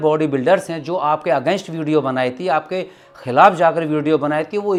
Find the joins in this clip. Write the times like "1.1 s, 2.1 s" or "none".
none